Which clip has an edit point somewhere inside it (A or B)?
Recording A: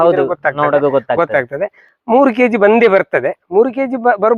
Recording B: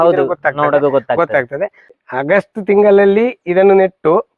B